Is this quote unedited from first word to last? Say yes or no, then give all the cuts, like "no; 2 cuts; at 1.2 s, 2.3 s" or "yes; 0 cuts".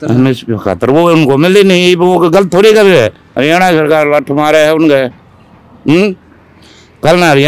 no; 1 cut; at 3.2 s